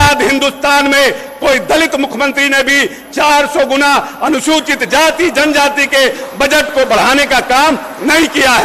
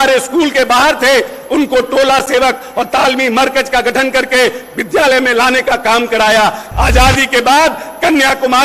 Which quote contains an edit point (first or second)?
second